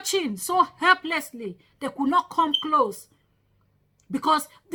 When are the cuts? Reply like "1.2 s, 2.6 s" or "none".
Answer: none